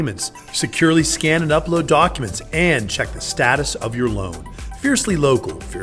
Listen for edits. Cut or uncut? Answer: uncut